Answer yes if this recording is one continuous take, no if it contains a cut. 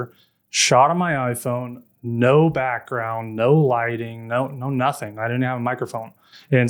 yes